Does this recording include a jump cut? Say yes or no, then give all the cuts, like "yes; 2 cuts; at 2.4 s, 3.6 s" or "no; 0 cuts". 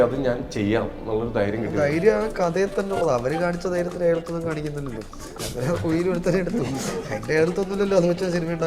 no; 0 cuts